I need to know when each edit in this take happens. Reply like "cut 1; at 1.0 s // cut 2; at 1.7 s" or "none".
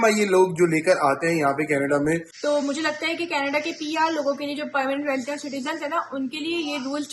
cut 1; at 2.3 s